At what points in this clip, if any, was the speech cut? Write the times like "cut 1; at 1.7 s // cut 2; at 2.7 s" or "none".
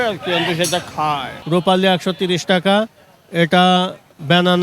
cut 1; at 1.3 s